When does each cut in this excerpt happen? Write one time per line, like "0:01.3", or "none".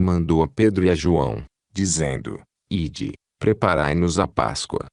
none